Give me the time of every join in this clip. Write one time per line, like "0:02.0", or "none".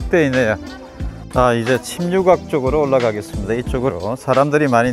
0:01.1